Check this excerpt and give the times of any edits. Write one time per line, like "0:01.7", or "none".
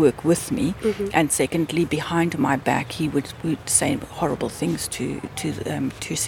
none